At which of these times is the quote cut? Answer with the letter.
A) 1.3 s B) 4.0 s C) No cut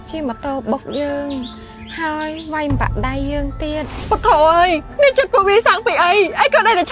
B